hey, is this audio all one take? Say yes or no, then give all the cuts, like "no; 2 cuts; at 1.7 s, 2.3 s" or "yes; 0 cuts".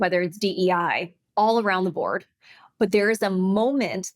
no; 1 cut; at 1.2 s